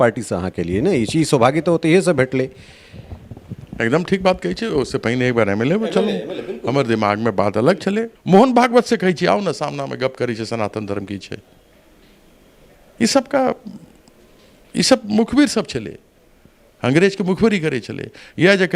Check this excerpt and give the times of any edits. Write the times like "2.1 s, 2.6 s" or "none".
8.1 s